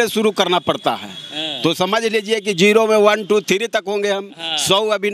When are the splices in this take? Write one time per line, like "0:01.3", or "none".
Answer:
none